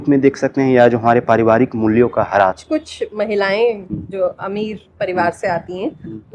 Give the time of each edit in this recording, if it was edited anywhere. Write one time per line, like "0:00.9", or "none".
0:02.6